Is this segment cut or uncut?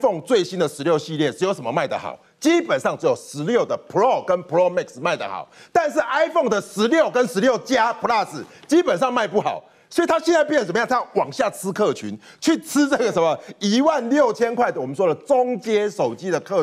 uncut